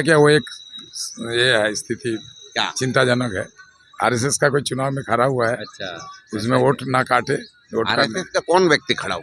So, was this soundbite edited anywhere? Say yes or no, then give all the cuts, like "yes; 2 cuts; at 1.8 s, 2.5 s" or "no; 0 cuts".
no; 0 cuts